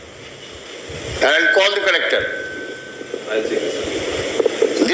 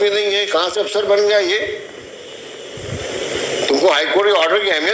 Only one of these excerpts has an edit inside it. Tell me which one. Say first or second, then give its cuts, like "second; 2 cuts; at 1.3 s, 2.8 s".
first; 1 cut; at 1.2 s